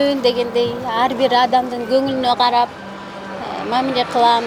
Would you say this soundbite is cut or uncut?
uncut